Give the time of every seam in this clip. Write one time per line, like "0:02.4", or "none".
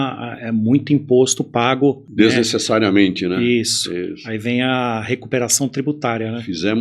0:02.0